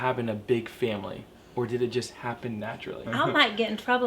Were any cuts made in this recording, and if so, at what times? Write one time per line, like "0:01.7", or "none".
0:03.0